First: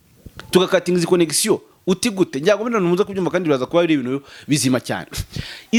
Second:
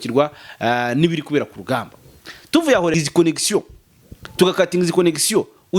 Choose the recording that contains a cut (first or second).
second